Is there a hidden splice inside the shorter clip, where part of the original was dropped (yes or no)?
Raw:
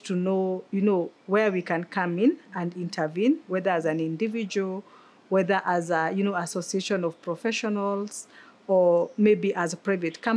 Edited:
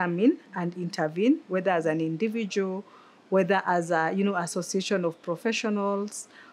no